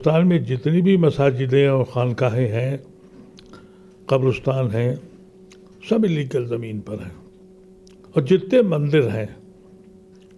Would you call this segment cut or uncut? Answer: uncut